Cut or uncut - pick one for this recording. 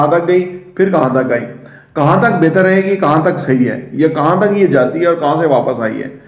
uncut